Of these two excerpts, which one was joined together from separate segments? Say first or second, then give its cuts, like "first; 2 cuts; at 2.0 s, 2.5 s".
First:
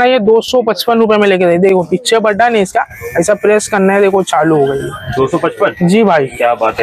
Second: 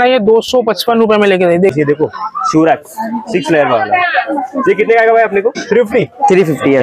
second; 2 cuts; at 1.7 s, 5.6 s